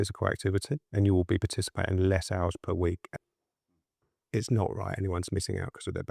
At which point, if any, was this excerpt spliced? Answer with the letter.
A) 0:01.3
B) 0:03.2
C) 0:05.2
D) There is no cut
B